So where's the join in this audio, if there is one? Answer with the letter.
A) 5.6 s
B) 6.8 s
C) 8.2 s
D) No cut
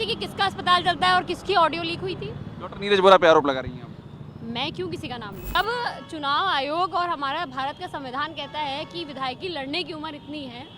A